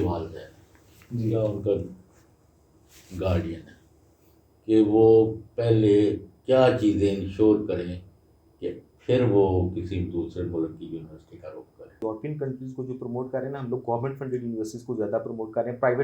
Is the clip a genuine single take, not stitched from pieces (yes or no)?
no